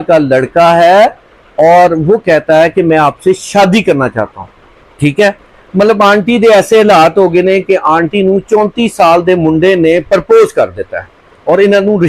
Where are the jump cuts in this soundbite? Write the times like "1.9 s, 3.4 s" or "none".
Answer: none